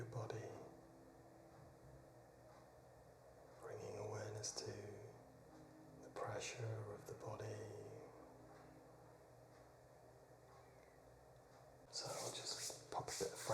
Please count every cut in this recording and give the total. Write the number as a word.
one